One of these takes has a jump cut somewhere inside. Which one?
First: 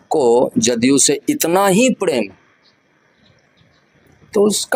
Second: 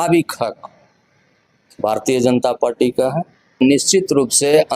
second; 1 cut; at 3.6 s

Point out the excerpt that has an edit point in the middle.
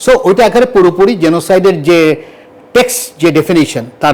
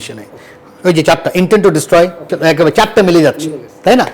second; 1 cut; at 2.3 s

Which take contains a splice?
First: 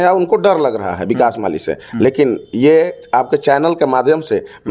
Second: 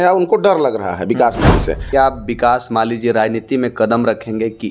second; 1 cut; at 1.9 s

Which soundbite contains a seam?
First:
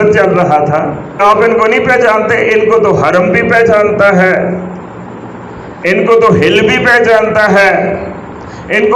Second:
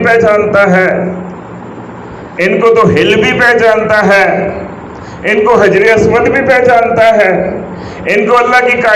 first; 1 cut; at 1.2 s

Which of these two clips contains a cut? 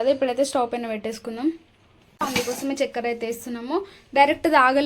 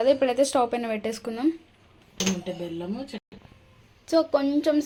first; 1 cut; at 2.2 s

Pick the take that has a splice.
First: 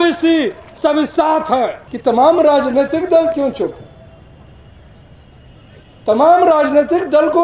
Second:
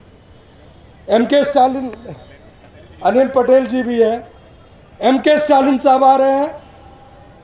first; 1 cut; at 1.9 s

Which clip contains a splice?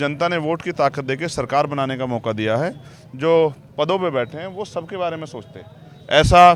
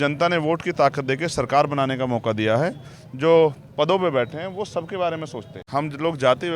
second; 1 cut; at 5.6 s

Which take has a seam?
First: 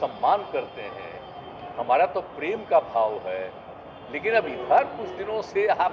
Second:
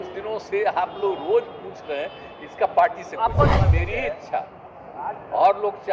second; 1 cut; at 3.6 s

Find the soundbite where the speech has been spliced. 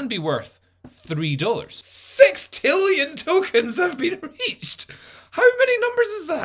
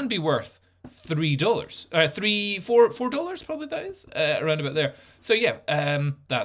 first; 1 cut; at 1.8 s

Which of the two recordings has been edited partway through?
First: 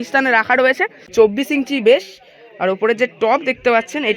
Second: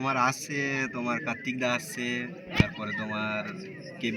first; 1 cut; at 1.1 s

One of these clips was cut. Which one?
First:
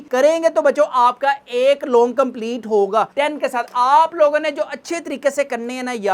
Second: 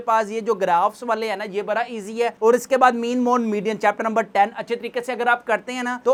first; 1 cut; at 3.1 s

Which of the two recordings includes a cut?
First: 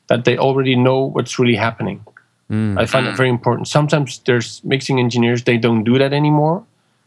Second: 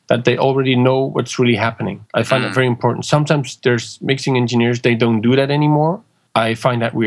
second; 2 cuts; at 2.1 s, 6.1 s

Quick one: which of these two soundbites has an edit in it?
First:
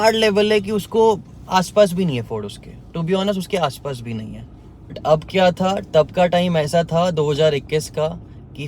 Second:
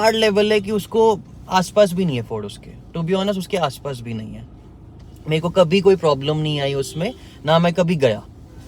first; 1 cut; at 5.0 s

